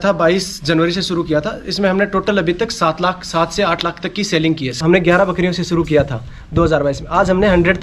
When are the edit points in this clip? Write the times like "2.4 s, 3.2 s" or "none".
4.8 s